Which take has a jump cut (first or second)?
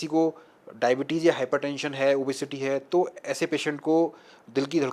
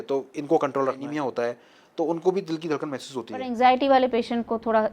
second